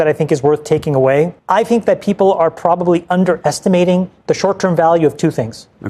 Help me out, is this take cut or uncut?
cut